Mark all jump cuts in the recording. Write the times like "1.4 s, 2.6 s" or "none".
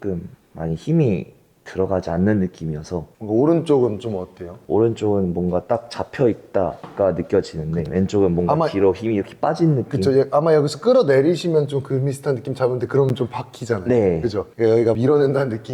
none